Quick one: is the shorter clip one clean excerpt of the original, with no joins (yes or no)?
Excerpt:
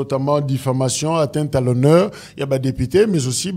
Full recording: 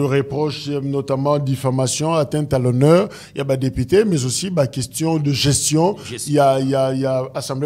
yes